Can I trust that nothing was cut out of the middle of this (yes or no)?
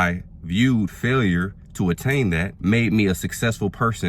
no